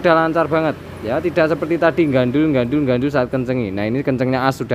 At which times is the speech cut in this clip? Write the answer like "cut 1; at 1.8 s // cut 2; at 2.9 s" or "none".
none